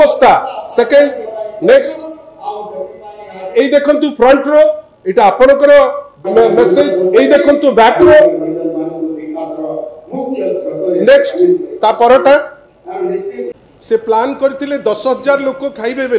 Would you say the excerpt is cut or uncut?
cut